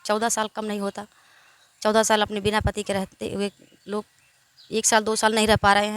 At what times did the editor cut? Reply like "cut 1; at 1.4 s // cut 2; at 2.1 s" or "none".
none